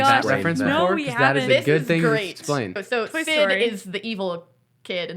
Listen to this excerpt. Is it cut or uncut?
cut